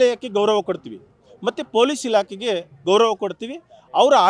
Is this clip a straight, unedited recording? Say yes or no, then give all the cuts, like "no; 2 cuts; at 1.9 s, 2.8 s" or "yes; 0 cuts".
yes; 0 cuts